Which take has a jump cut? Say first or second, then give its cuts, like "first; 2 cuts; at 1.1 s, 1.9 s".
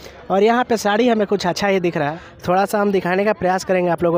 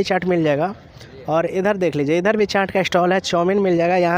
first; 1 cut; at 2.2 s